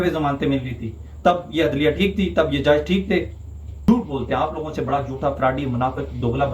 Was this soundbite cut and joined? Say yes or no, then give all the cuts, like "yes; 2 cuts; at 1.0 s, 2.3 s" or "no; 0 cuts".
yes; 1 cut; at 3.7 s